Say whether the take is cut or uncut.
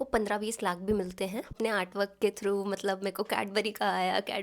cut